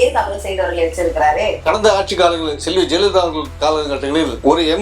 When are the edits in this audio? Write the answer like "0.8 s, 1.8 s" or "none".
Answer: 1.6 s